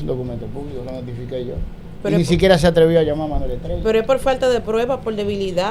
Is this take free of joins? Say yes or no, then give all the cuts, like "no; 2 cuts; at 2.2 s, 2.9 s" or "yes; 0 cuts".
yes; 0 cuts